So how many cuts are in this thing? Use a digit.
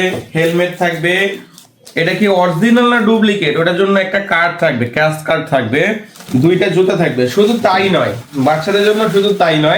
0